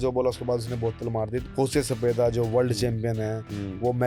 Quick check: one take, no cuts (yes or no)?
no